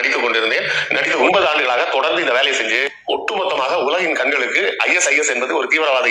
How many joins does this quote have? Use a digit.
1